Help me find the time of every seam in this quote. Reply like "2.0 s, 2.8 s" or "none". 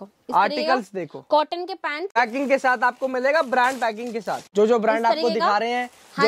2.1 s, 4.4 s